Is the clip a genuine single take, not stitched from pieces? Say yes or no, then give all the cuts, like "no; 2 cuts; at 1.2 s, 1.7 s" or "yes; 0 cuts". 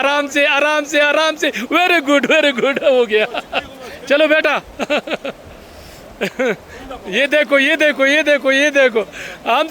yes; 0 cuts